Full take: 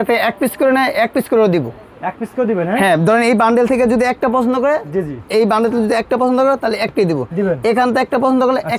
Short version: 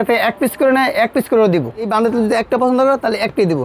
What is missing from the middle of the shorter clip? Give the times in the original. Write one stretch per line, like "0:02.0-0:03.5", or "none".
0:01.9-0:05.5